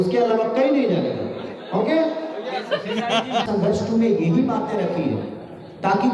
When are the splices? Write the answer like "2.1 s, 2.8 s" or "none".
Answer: 3.5 s

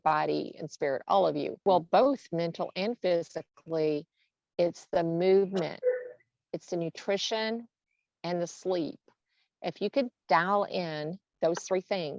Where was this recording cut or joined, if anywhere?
1.5 s

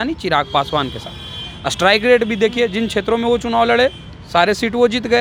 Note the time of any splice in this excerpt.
none

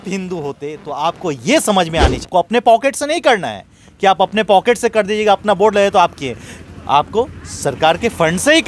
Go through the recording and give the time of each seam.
2.3 s

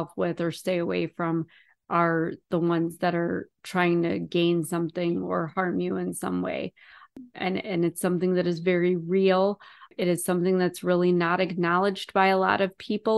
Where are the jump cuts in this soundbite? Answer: none

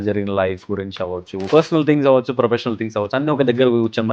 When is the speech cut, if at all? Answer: 1.4 s

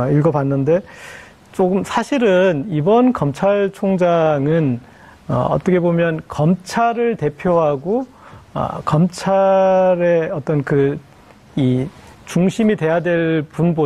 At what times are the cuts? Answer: 6.0 s

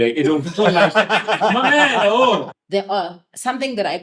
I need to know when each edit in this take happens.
2.5 s

